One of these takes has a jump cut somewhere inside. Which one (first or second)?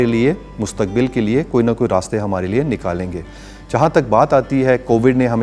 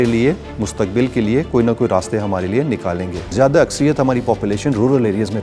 second